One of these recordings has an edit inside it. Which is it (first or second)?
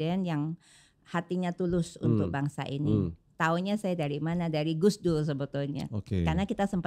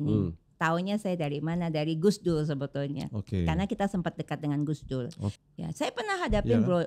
second